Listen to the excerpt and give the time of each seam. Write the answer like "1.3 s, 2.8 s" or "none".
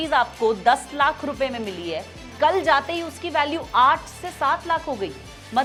none